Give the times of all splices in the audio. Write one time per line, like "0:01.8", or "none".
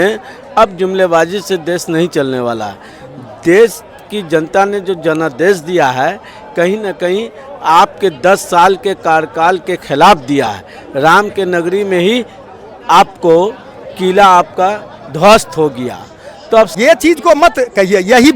0:16.7